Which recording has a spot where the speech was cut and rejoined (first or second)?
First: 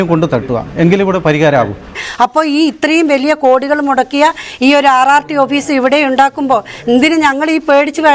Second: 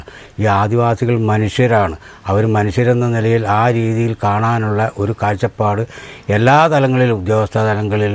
first